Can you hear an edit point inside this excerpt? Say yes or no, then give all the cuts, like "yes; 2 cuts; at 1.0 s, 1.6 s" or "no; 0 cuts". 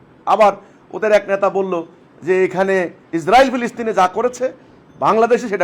yes; 1 cut; at 3.0 s